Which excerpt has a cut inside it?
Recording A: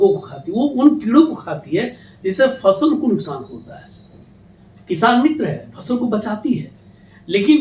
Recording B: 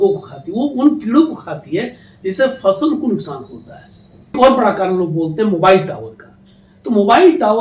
B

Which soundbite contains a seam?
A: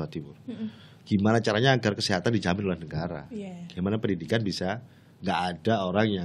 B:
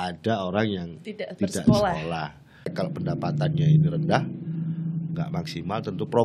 B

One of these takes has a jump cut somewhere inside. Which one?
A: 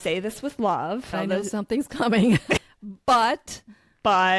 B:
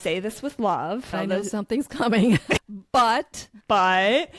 B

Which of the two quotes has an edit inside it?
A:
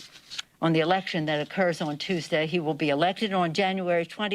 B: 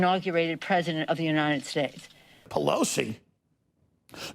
B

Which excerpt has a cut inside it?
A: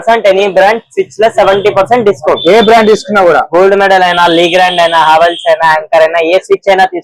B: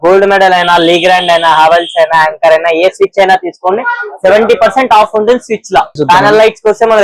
B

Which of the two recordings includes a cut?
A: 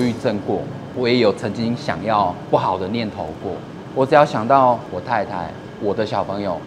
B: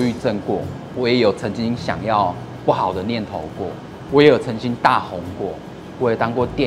A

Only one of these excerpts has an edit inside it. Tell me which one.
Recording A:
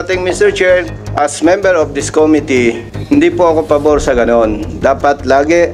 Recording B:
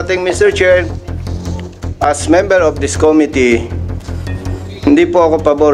A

